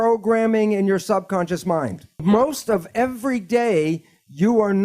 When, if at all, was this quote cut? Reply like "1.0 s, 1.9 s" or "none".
2.2 s